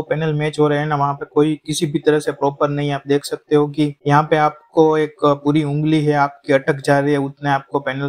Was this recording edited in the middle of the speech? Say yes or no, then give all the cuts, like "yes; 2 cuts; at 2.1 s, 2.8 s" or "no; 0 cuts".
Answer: no; 0 cuts